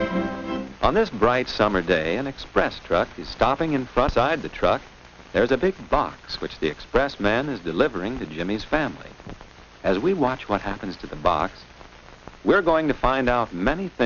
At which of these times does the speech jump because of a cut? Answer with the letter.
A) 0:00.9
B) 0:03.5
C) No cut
A